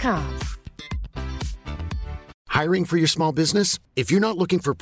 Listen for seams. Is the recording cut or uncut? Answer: cut